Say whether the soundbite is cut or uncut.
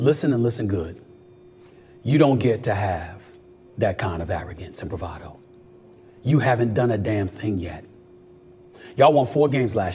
uncut